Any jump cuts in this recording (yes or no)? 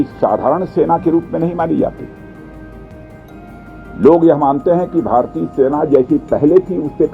no